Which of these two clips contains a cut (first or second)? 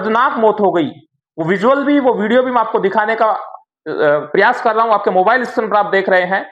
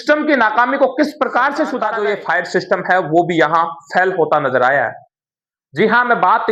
second